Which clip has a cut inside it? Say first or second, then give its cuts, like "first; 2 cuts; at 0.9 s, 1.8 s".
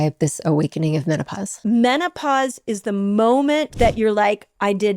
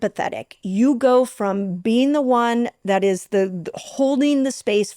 first; 2 cuts; at 1.4 s, 3.7 s